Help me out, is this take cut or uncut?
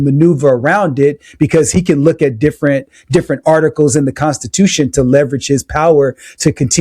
uncut